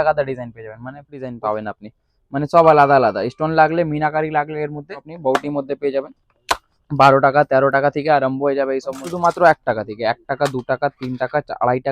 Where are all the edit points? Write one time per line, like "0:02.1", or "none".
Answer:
0:01.3
0:05.1
0:09.0